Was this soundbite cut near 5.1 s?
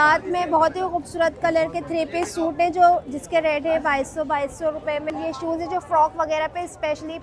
yes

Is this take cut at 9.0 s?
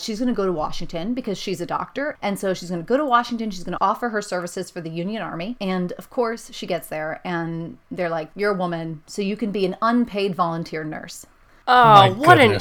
yes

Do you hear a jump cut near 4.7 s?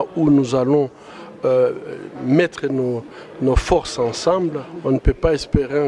yes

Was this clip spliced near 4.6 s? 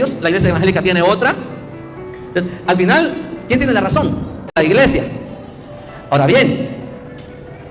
yes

